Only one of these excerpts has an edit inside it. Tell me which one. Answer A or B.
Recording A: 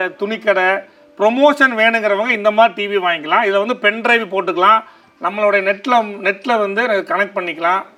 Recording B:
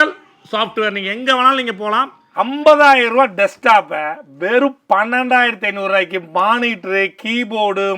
B